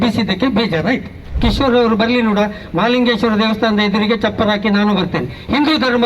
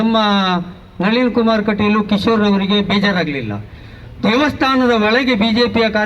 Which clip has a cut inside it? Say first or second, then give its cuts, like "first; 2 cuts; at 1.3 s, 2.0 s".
first; 1 cut; at 1.4 s